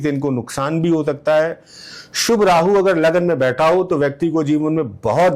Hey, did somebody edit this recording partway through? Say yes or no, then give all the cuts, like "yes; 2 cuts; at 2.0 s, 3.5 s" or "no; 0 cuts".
no; 0 cuts